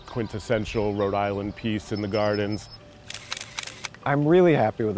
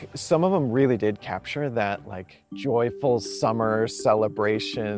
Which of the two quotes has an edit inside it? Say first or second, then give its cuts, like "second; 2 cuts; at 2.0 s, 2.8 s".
first; 1 cut; at 2.7 s